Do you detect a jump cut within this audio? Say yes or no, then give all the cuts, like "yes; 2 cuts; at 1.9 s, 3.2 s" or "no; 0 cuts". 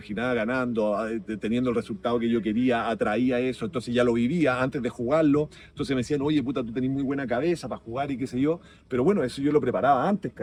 no; 0 cuts